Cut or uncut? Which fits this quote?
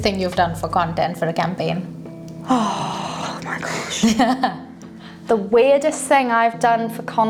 uncut